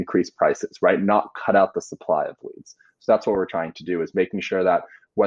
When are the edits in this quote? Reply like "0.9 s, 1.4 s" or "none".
none